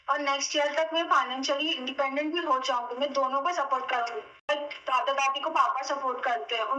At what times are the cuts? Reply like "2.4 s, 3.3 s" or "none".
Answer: 4.5 s